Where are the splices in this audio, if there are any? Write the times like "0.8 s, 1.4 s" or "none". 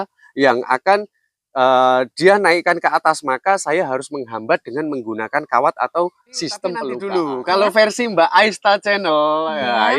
7.0 s